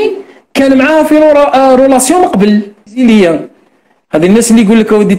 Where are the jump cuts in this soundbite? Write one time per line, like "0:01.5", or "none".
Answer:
0:03.0